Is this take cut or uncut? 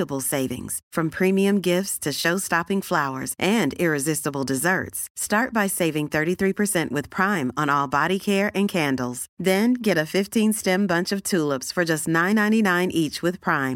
uncut